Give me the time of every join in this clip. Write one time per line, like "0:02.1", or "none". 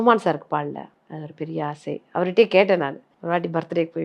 0:01.0
0:03.1

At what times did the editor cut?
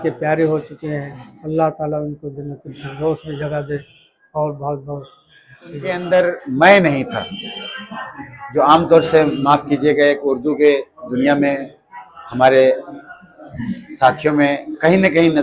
0:05.7

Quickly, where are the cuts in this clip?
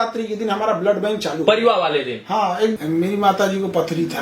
0:02.7

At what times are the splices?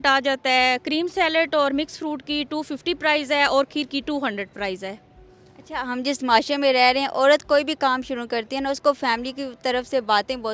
none

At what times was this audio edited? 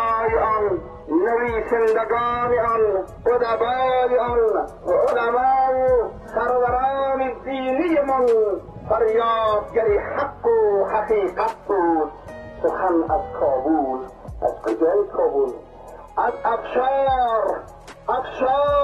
0:00.9
0:03.1
0:04.7
0:06.2
0:08.7

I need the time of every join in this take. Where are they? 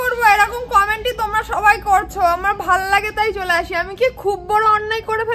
none

